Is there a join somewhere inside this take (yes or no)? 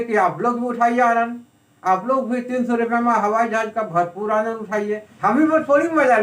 yes